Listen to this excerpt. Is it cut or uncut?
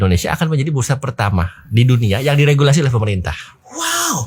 uncut